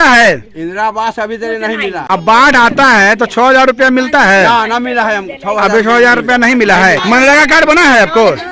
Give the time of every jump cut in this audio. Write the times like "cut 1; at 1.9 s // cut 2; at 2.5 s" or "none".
cut 1; at 2.0 s // cut 2; at 7.0 s